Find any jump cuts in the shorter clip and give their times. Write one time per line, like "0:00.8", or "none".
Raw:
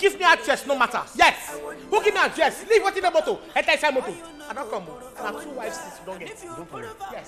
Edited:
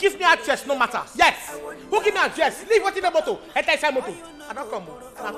none